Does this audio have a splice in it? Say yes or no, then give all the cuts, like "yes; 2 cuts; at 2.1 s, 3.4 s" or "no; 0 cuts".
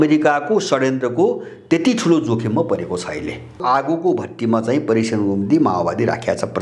yes; 1 cut; at 3.6 s